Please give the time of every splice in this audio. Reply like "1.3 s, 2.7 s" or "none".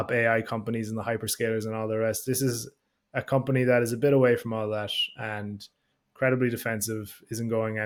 none